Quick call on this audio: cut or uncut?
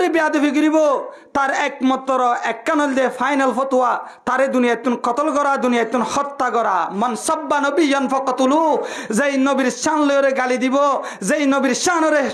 uncut